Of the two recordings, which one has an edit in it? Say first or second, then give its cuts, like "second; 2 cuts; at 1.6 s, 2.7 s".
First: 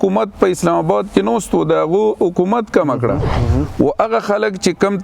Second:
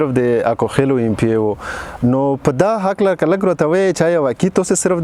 first; 1 cut; at 3.4 s